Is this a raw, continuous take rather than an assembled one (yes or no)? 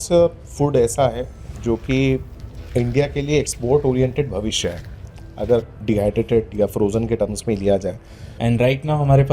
no